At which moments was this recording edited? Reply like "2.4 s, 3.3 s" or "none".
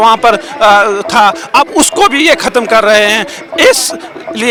none